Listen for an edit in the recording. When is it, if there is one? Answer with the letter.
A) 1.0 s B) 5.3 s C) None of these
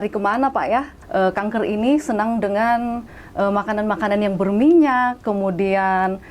A